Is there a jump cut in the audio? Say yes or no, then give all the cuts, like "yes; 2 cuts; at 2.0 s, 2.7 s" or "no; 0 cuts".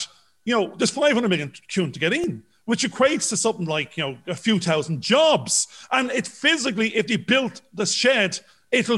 no; 0 cuts